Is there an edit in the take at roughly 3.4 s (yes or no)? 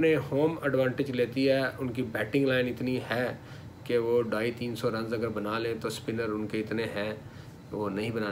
no